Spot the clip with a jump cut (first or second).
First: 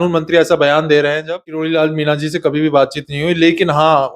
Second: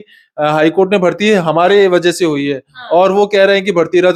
first